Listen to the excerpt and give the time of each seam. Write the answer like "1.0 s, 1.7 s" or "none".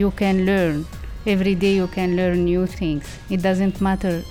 2.7 s